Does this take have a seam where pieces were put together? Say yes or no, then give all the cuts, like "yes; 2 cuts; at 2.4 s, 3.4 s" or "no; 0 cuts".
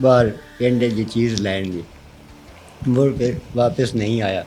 no; 0 cuts